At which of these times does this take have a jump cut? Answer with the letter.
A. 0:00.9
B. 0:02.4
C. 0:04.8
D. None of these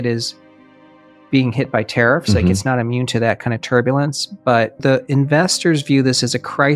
C